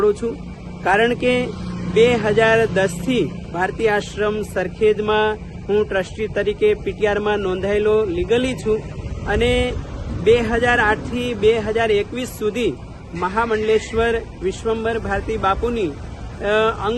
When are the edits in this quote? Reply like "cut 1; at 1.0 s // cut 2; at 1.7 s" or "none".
none